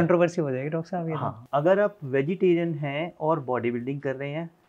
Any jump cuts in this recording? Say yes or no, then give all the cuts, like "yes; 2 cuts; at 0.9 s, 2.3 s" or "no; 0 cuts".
yes; 1 cut; at 1.4 s